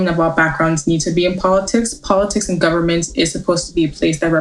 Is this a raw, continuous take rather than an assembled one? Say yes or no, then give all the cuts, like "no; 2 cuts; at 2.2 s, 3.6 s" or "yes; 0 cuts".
yes; 0 cuts